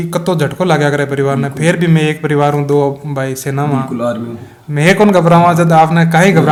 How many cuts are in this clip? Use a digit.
0